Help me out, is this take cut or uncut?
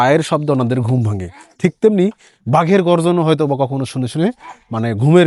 uncut